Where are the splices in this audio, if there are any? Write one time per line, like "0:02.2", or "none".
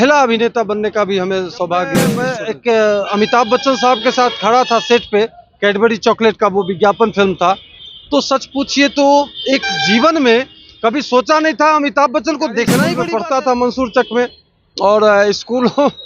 0:02.2
0:12.9